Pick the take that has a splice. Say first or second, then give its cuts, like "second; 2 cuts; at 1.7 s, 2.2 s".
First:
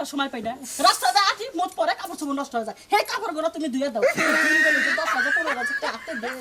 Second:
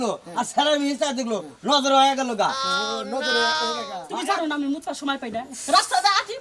second; 1 cut; at 4.0 s